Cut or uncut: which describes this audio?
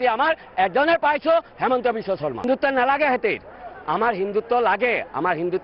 cut